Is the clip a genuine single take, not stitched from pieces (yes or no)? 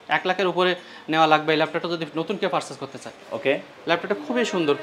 yes